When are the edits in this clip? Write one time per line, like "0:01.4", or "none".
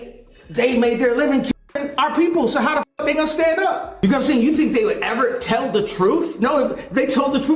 0:04.0